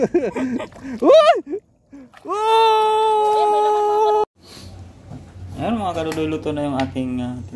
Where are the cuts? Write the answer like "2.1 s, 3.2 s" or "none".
4.2 s